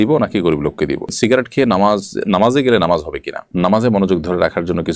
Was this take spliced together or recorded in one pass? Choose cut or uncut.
cut